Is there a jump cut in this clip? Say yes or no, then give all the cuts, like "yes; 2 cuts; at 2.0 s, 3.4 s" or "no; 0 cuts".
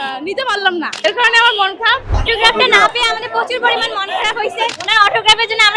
yes; 3 cuts; at 0.9 s, 2.1 s, 4.8 s